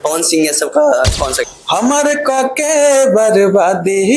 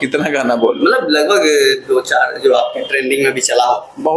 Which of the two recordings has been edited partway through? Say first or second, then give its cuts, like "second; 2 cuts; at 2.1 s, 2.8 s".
first; 1 cut; at 1.4 s